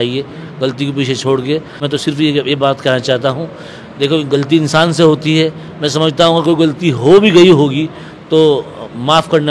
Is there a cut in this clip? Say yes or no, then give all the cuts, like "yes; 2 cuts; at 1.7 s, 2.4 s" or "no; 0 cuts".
yes; 1 cut; at 1.8 s